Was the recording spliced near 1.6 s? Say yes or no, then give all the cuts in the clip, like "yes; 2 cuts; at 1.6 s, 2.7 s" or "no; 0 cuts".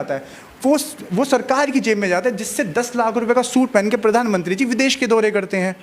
no; 0 cuts